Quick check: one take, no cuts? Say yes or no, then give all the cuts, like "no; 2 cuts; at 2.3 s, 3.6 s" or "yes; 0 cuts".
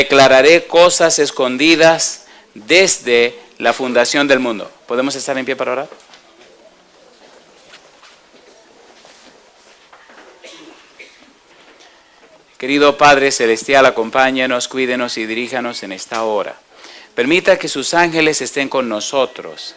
yes; 0 cuts